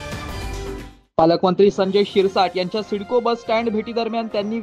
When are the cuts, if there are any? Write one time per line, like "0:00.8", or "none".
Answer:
none

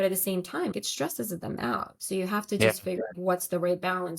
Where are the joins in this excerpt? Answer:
0:00.7
0:01.9
0:03.2

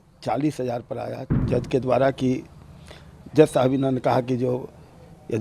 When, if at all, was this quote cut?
0:01.4

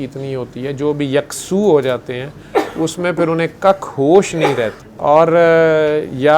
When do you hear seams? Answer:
0:04.8

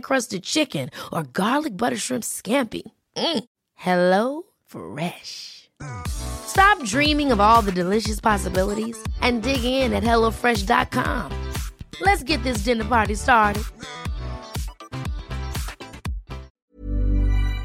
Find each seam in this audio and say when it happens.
0:16.5

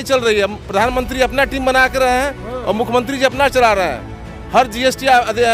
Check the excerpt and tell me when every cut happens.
none

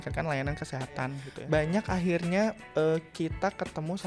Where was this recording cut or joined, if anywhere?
0:01.3

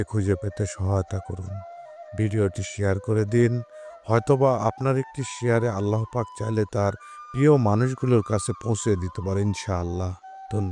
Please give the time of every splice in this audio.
none

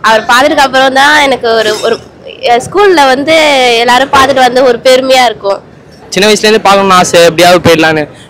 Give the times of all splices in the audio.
0:06.0

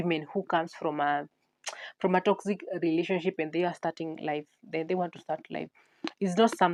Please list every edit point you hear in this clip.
none

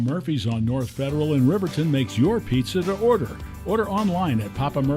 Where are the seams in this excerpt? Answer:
0:00.9

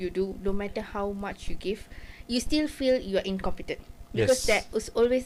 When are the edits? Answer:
none

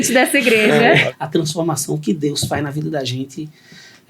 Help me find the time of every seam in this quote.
0:01.0

